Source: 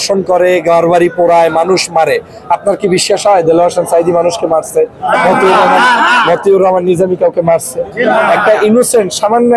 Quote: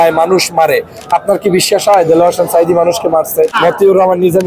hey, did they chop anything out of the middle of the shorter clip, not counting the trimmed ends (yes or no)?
yes